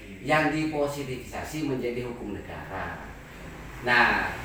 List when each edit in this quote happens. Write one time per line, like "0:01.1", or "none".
none